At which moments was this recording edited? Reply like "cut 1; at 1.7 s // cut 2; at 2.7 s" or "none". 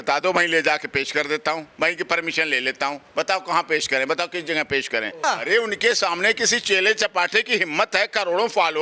cut 1; at 5.2 s